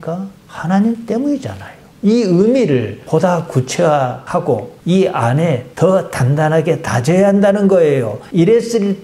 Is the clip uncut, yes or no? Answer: yes